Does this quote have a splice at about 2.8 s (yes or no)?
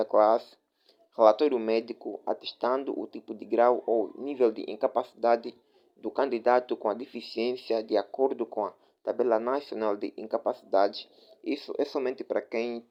no